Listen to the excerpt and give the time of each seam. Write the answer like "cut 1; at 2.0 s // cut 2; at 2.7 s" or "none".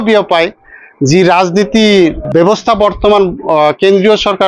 cut 1; at 2.3 s